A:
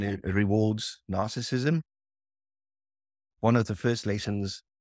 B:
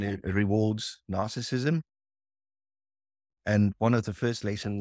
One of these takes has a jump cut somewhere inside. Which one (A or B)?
A